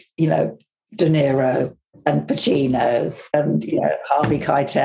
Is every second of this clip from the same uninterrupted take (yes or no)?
no